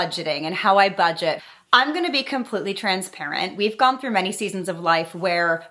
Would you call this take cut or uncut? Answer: uncut